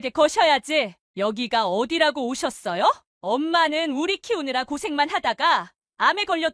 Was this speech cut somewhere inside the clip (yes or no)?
yes